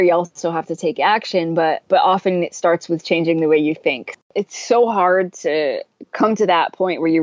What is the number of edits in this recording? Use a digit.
2